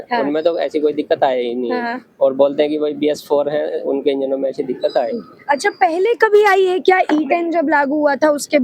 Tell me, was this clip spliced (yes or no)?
no